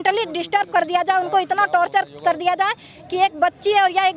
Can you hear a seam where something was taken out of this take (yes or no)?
no